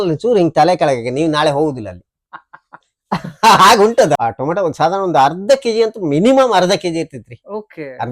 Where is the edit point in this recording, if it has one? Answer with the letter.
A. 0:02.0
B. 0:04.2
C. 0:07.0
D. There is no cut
B